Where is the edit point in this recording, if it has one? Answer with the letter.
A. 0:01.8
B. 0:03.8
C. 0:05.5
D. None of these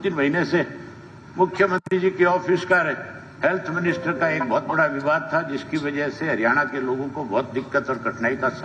D